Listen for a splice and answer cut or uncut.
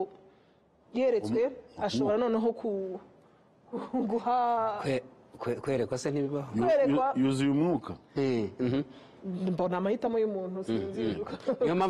uncut